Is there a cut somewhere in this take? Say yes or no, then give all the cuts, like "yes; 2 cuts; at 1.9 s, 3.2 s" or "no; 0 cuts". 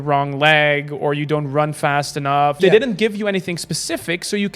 yes; 1 cut; at 2.6 s